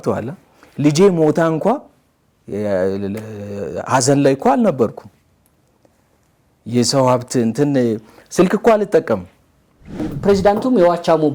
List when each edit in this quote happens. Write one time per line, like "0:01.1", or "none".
0:10.1